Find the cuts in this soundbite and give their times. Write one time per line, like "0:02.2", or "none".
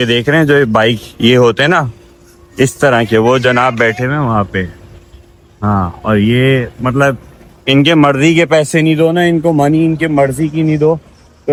none